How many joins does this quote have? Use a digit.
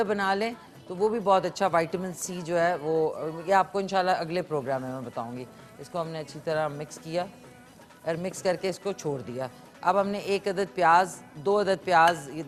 0